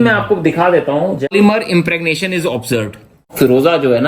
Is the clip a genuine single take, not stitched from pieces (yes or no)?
no